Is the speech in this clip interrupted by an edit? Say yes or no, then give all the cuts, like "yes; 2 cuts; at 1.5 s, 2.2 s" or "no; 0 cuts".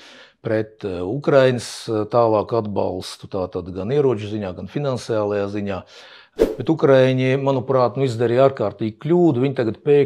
yes; 1 cut; at 6.3 s